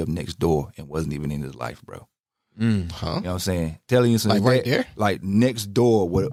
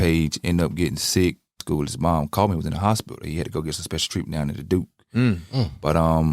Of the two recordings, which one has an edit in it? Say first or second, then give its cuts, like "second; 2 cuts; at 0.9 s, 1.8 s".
second; 1 cut; at 1.6 s